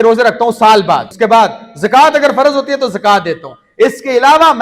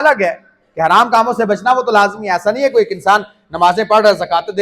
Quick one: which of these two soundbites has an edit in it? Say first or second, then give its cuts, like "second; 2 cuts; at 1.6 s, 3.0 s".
first; 1 cut; at 1.1 s